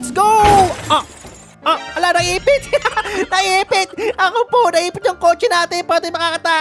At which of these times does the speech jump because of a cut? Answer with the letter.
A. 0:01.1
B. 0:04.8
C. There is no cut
C